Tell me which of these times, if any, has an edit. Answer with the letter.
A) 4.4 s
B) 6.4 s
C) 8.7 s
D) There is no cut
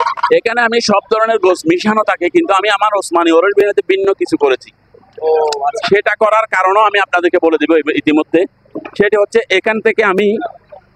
D